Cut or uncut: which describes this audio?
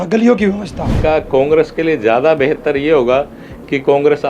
cut